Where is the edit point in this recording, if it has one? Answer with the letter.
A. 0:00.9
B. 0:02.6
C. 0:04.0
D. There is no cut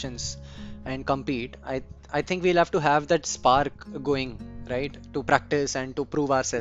D